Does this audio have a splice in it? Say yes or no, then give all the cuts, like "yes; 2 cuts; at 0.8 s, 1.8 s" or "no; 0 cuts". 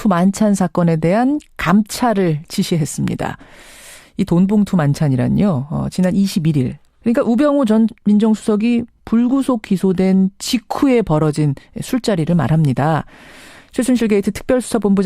yes; 1 cut; at 9.8 s